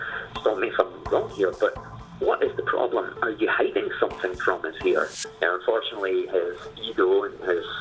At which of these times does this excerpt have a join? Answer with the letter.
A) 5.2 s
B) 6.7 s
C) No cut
A